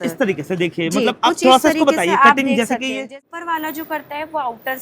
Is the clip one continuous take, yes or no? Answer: no